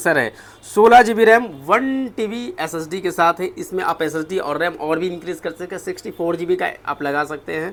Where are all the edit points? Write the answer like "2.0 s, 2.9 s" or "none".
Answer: none